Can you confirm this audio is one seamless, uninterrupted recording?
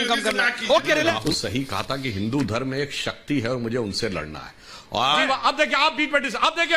no; 2 cuts; at 1.2 s, 5.0 s

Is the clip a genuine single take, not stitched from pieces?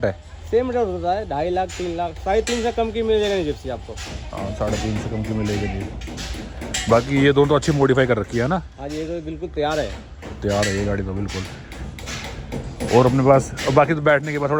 yes; 0 cuts

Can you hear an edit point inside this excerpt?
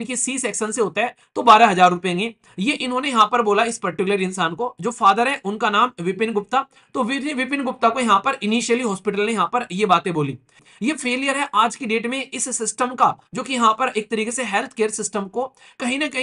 yes; 1 cut; at 10.6 s

